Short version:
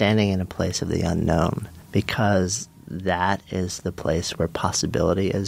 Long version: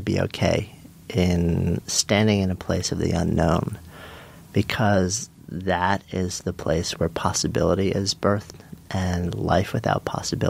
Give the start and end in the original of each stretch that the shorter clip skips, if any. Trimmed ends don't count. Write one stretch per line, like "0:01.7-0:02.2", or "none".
0:03.8-0:04.3